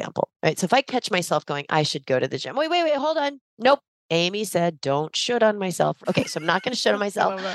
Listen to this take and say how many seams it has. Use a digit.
1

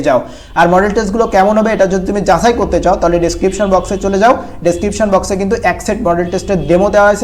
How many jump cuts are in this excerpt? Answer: 0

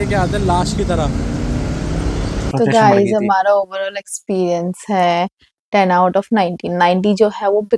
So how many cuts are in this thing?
1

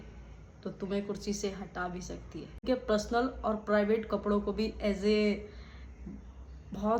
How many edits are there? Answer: 1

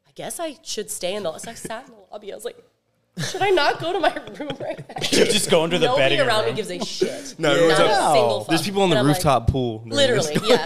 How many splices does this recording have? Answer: 0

